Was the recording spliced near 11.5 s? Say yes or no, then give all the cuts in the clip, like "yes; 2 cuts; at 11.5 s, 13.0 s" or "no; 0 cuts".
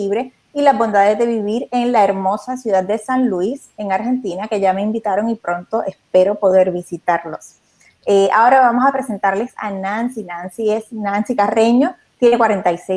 yes; 1 cut; at 11.5 s